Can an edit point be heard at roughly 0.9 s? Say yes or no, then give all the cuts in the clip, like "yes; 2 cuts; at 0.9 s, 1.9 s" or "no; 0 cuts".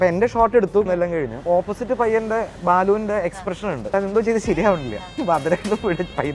yes; 3 cuts; at 0.9 s, 3.9 s, 5.1 s